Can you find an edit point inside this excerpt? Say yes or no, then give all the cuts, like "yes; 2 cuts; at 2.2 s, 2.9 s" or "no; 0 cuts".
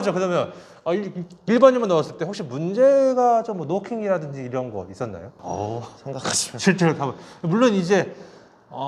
yes; 1 cut; at 5.3 s